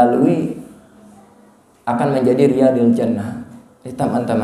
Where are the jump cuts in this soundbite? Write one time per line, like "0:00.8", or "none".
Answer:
none